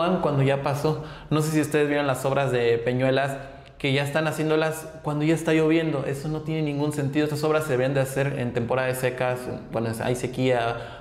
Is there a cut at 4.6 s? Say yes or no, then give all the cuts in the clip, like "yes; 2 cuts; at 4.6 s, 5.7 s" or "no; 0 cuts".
no; 0 cuts